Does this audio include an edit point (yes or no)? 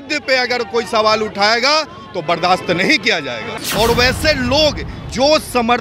yes